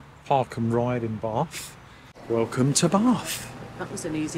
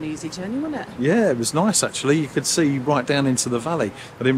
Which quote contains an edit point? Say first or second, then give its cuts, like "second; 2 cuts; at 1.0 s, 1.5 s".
first; 1 cut; at 2.1 s